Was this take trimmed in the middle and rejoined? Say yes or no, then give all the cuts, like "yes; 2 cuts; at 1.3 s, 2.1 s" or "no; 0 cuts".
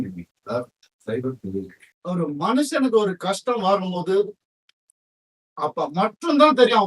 yes; 1 cut; at 1.8 s